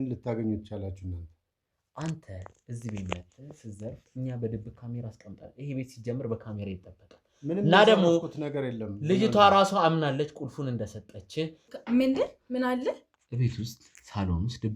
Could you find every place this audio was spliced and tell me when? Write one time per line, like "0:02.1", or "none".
0:11.7